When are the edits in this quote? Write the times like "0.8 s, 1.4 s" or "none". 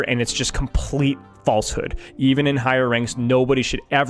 none